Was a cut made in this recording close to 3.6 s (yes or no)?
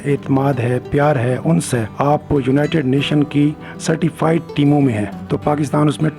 no